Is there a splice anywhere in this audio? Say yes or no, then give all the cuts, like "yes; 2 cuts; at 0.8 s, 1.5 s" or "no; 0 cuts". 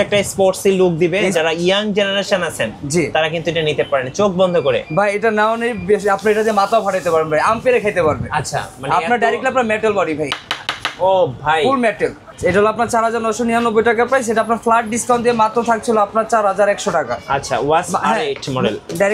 no; 0 cuts